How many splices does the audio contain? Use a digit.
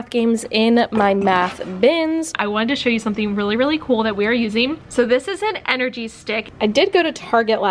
2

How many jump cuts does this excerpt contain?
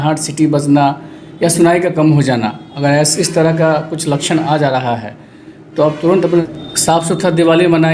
1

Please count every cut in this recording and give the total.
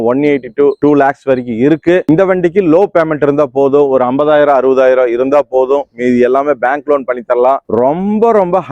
2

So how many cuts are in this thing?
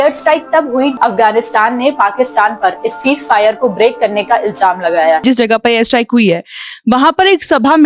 2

